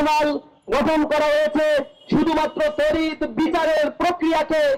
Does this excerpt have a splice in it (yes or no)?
no